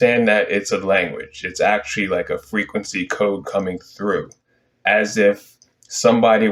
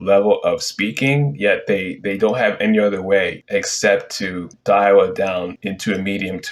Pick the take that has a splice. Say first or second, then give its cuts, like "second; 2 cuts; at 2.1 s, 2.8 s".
second; 3 cuts; at 3.4 s, 4.5 s, 5.6 s